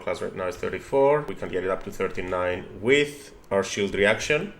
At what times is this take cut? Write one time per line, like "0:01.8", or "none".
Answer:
0:01.3